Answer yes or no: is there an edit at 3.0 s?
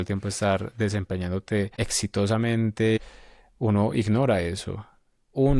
yes